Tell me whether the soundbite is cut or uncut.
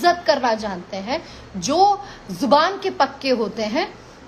uncut